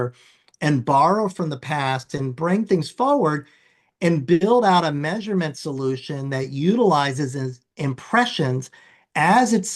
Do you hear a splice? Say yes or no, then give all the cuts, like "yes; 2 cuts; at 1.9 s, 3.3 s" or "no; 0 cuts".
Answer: no; 0 cuts